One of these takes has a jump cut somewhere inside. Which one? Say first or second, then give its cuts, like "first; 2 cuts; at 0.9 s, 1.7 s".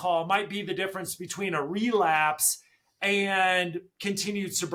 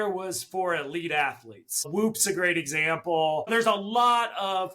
second; 1 cut; at 3.4 s